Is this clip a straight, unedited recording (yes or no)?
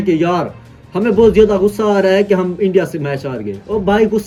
yes